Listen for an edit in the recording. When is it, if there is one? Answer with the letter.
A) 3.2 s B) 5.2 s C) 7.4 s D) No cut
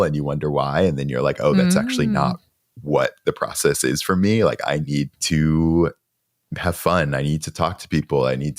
B